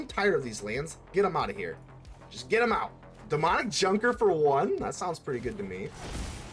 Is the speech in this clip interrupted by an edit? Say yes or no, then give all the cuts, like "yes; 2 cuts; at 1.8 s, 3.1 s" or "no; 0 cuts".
yes; 1 cut; at 3.1 s